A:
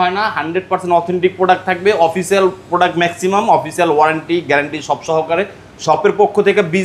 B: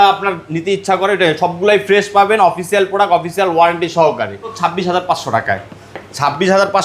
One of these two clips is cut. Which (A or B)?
B